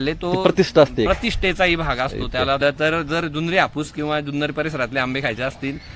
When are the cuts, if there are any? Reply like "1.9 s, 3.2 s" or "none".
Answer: 2.6 s